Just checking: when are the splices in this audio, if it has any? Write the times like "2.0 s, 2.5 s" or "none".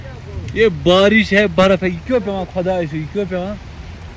none

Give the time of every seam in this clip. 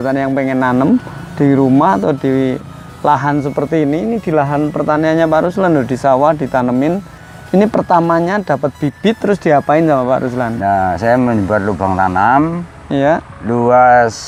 none

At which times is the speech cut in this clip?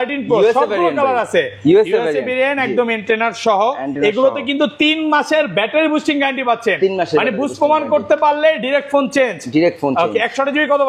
none

